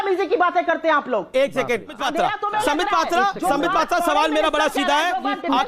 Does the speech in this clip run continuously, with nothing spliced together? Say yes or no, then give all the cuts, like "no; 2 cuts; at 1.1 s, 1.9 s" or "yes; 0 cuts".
no; 1 cut; at 2.0 s